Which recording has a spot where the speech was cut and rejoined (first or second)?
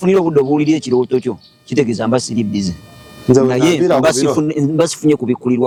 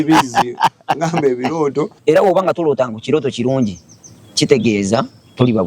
second